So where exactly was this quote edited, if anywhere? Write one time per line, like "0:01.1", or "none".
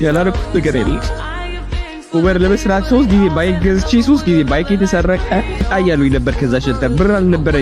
0:05.6